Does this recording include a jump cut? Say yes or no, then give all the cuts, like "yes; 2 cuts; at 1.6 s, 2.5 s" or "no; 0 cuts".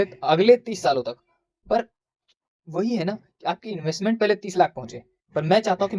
no; 0 cuts